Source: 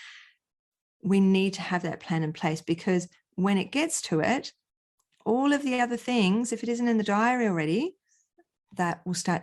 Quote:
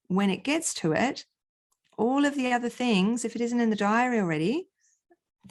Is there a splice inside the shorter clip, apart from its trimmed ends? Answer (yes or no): no